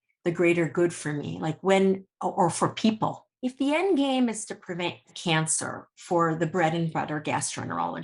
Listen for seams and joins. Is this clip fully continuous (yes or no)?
no